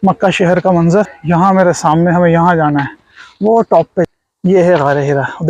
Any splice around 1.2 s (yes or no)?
yes